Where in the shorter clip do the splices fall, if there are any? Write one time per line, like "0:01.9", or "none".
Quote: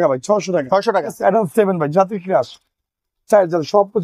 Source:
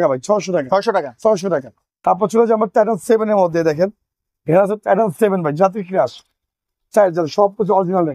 0:01.1